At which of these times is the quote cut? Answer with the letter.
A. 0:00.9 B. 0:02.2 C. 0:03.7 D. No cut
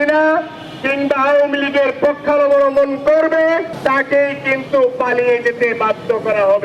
C